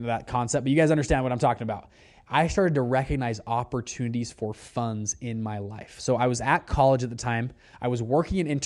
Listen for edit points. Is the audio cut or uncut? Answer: uncut